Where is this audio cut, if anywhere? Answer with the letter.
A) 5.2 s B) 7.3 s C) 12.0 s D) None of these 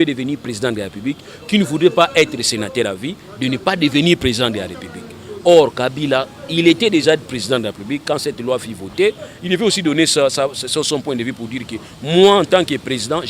D